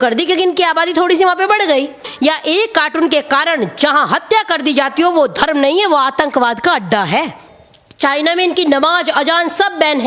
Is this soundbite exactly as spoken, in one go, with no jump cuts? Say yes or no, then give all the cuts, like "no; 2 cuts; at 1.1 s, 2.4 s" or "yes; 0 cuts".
no; 2 cuts; at 2.1 s, 7.5 s